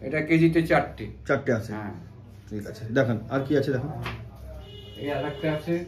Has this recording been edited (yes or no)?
no